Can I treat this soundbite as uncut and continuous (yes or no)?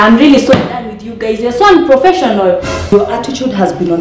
no